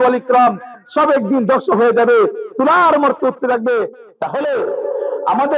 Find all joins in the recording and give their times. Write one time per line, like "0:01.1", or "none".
0:04.0